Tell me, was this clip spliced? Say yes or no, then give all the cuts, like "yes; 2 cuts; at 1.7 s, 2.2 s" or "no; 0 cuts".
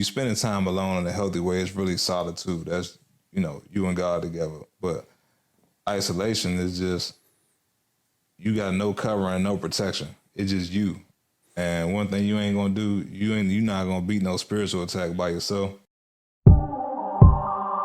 yes; 1 cut; at 15.8 s